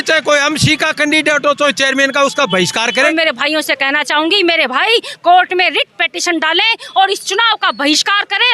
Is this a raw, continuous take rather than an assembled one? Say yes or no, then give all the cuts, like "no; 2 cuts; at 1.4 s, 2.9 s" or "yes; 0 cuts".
no; 1 cut; at 3.1 s